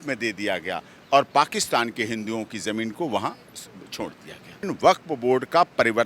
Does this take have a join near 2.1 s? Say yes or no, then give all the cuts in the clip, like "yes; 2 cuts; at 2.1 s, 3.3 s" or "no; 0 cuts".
no; 1 cut; at 4.7 s